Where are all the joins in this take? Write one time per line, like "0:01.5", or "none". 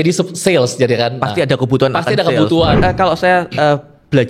0:02.7